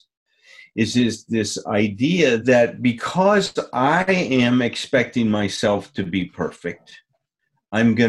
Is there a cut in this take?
yes; 1 cut; at 2.4 s

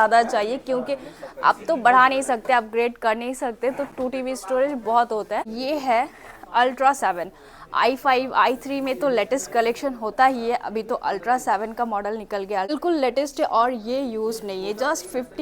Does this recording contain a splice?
yes; 2 cuts; at 5.5 s, 12.7 s

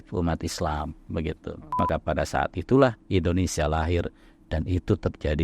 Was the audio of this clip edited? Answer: yes; 1 cut; at 1.8 s

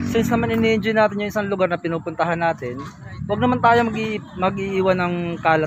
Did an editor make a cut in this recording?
yes; 1 cut; at 2.9 s

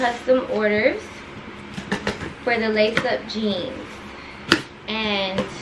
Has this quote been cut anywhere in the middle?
yes; 1 cut; at 4.4 s

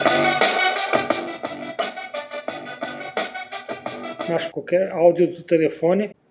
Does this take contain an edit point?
yes; 1 cut; at 4.5 s

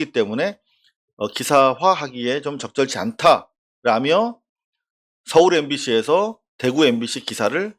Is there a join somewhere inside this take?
no; 0 cuts

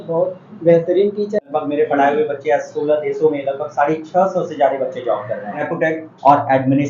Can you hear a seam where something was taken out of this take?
yes; 2 cuts; at 1.5 s, 5.7 s

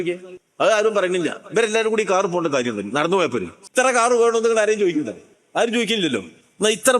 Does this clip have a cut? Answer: yes; 1 cut; at 3.6 s

